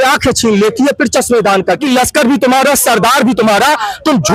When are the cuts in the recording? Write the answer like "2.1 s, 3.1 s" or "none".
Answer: 1.8 s